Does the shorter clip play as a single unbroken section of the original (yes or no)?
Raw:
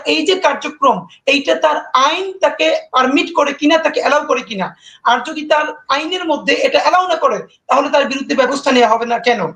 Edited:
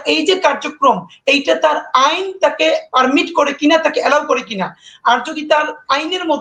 yes